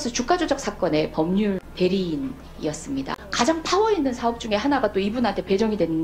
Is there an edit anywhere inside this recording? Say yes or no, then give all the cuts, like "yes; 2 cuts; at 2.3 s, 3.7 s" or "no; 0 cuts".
yes; 2 cuts; at 1.6 s, 3.2 s